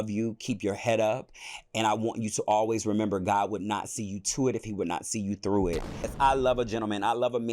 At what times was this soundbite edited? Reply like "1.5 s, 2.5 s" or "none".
6.1 s